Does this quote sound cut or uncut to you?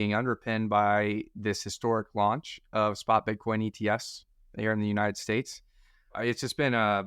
cut